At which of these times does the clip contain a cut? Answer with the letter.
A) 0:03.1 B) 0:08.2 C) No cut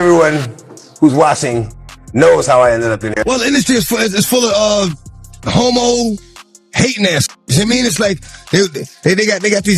A